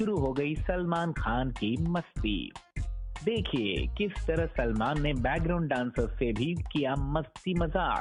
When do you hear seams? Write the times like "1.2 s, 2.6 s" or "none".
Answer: none